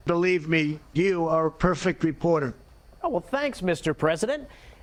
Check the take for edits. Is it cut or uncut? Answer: uncut